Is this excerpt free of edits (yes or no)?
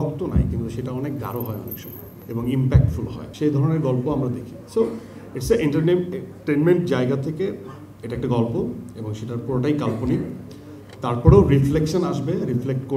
yes